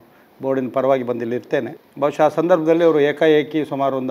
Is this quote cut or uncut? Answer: cut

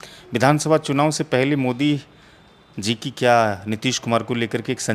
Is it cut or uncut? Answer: uncut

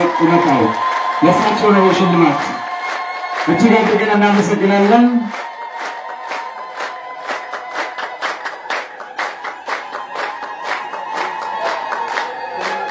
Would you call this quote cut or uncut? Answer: uncut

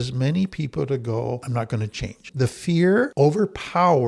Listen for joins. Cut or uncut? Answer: cut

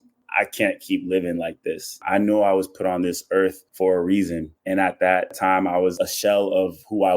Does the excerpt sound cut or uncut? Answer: cut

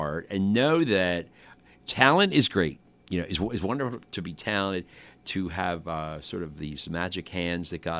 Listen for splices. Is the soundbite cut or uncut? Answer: cut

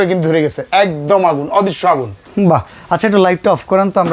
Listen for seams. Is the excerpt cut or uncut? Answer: cut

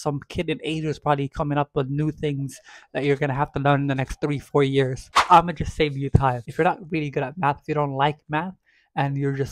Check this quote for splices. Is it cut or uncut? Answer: cut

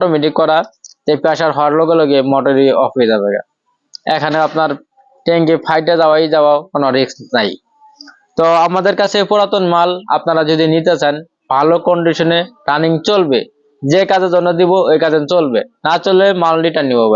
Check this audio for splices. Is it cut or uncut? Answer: uncut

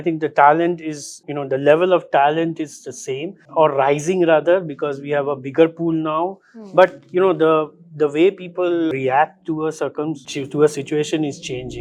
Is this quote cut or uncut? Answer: uncut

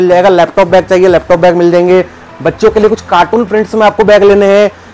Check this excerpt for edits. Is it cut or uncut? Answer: uncut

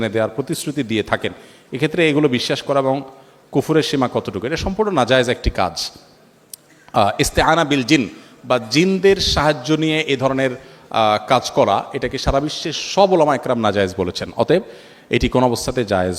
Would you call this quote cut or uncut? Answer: uncut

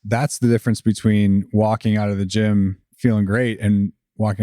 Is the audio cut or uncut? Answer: cut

